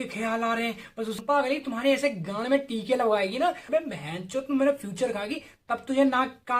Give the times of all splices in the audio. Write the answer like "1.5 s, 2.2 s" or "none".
1.2 s, 3.6 s